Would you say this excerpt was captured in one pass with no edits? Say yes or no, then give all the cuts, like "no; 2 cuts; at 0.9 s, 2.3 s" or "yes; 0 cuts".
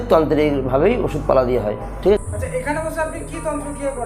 no; 1 cut; at 2.2 s